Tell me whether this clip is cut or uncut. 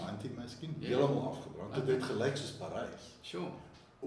uncut